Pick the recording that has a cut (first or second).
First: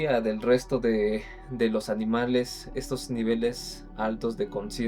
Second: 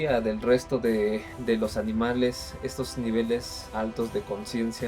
second